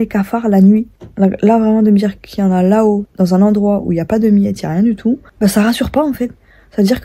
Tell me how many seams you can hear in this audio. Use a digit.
3